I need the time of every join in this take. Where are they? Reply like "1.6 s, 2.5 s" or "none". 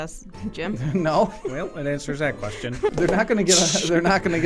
2.9 s